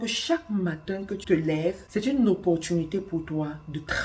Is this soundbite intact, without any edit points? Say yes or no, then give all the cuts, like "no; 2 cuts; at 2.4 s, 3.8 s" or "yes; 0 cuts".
no; 1 cut; at 1.8 s